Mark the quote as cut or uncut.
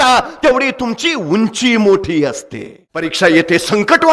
cut